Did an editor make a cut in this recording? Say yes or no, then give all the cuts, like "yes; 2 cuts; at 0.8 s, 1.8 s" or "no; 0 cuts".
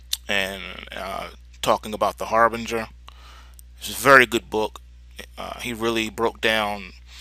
yes; 1 cut; at 1.5 s